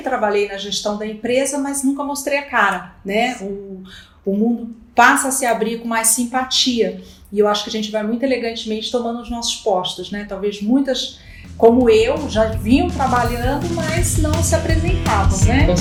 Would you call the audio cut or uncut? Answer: uncut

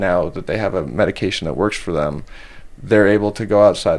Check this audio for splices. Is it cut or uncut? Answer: uncut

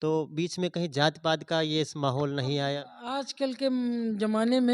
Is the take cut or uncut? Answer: uncut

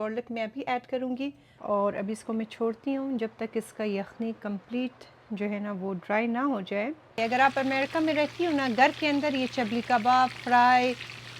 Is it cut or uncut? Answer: cut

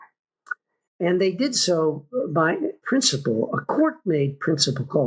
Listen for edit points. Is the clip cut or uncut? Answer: cut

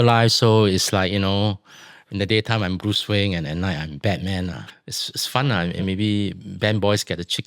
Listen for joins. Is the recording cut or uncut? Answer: cut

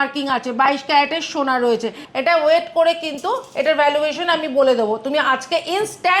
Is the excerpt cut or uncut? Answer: cut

